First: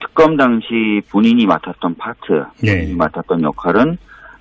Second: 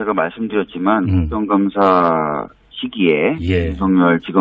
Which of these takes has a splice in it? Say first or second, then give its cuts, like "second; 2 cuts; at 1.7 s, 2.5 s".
first; 1 cut; at 1.6 s